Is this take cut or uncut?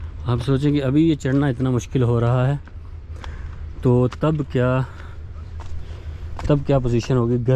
uncut